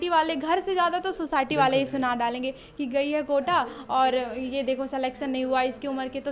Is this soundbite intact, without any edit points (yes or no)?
yes